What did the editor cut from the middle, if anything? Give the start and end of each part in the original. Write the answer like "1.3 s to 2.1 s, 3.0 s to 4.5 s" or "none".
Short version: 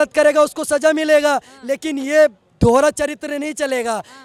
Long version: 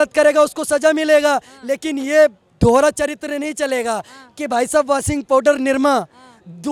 none